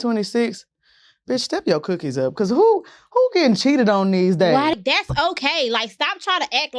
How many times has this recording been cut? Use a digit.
1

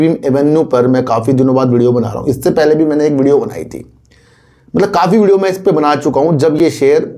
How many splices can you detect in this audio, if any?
0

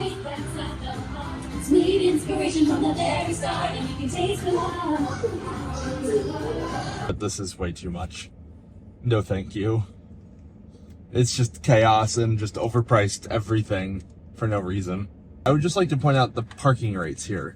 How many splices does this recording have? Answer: 2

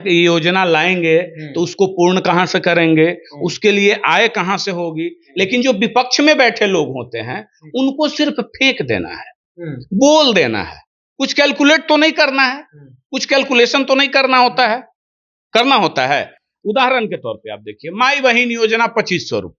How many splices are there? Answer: 0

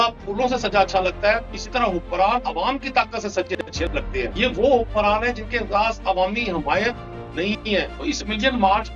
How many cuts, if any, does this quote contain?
3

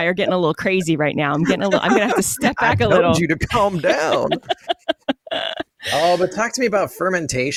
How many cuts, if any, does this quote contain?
0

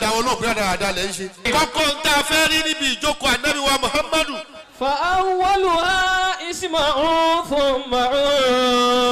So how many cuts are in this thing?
1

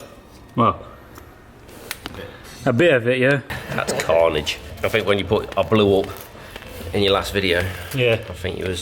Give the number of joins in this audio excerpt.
2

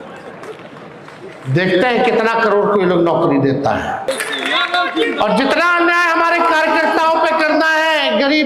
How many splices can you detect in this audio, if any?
1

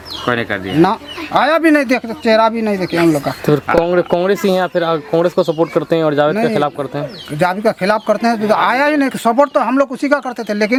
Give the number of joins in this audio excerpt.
0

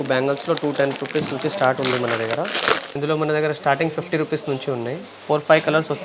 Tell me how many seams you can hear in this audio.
2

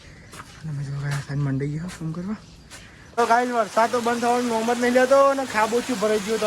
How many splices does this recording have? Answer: 1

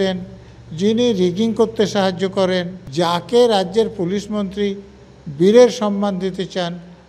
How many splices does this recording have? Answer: 1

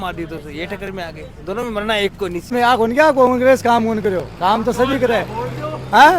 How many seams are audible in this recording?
1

